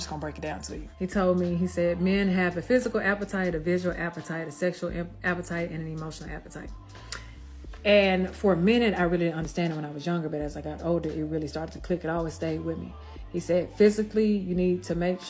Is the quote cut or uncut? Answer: cut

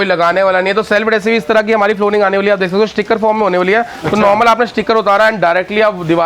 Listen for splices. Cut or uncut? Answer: uncut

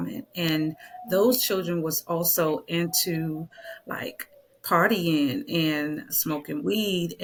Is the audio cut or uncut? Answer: uncut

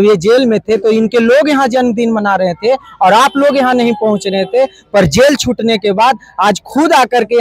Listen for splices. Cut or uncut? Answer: uncut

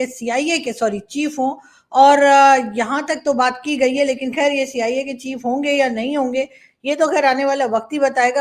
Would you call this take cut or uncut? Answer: uncut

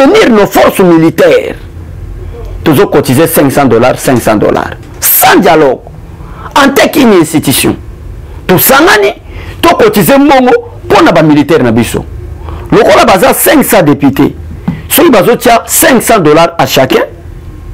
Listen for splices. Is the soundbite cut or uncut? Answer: uncut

